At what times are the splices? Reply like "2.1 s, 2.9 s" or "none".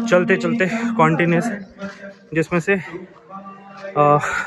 none